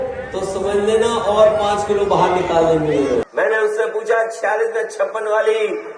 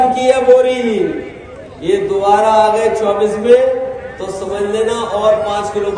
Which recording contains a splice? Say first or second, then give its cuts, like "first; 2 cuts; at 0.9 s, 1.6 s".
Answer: first; 1 cut; at 3.3 s